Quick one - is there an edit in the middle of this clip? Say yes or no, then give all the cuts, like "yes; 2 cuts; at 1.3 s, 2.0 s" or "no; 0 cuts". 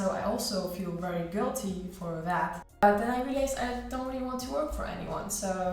yes; 1 cut; at 2.8 s